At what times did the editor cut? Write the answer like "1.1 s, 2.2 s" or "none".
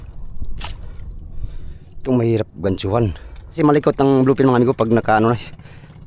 3.6 s